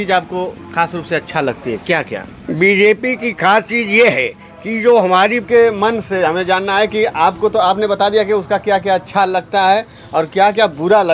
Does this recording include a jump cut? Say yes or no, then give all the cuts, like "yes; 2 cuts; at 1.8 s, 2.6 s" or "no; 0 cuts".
yes; 1 cut; at 5.4 s